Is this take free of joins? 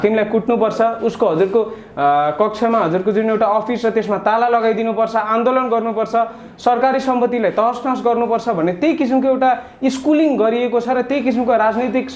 yes; 0 cuts

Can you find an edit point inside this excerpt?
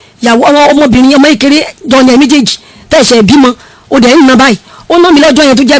no; 0 cuts

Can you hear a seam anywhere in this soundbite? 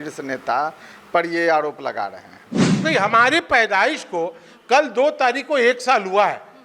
yes; 1 cut; at 2.8 s

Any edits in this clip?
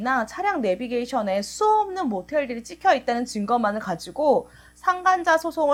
no; 0 cuts

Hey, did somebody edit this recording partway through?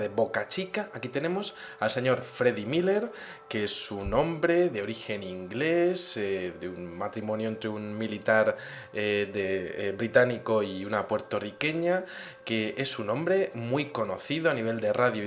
no; 0 cuts

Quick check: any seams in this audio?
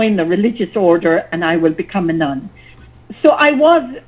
yes; 1 cut; at 3.0 s

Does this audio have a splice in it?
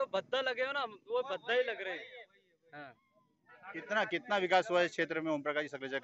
no; 0 cuts

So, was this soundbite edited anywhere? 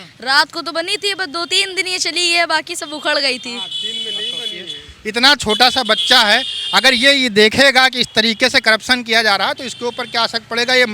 no; 0 cuts

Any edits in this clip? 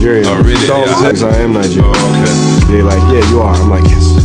yes; 1 cut; at 0.9 s

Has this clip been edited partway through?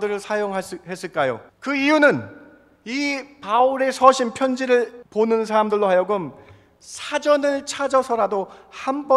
yes; 2 cuts; at 1.5 s, 5.0 s

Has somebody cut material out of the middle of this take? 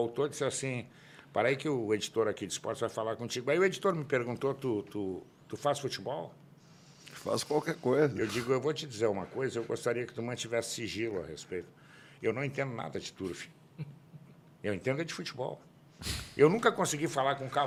no; 0 cuts

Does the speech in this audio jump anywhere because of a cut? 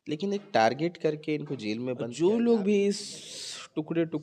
yes; 1 cut; at 2.1 s

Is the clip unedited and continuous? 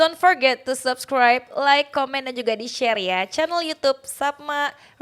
yes; 0 cuts

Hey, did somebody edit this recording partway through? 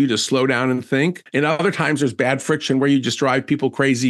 yes; 1 cut; at 1.2 s

